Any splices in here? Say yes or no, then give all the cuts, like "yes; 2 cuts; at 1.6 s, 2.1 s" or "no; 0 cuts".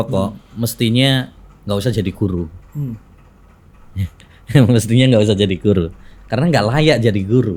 no; 0 cuts